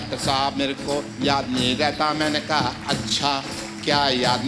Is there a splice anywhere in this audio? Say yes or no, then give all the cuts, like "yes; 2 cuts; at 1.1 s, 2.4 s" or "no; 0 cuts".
no; 0 cuts